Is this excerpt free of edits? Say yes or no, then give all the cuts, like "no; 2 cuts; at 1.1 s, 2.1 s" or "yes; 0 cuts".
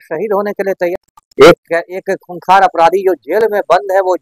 no; 1 cut; at 1.0 s